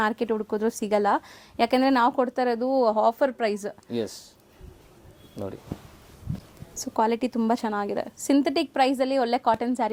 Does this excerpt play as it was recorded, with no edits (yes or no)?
yes